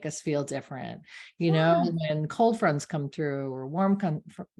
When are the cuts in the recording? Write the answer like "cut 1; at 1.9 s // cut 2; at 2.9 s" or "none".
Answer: none